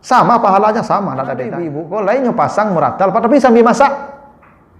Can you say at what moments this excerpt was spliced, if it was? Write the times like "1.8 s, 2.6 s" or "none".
1.8 s